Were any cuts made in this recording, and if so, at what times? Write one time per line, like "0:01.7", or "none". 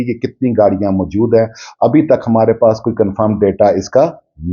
none